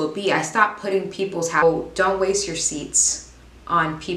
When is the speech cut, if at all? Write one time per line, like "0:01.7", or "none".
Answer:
0:01.6